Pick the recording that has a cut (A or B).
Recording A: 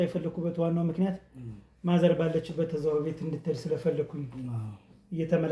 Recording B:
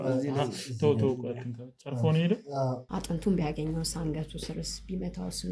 B